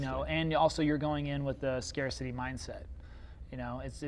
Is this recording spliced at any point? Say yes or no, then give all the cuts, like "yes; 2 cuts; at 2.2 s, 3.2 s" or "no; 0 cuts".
no; 0 cuts